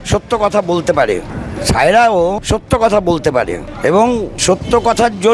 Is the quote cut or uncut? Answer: cut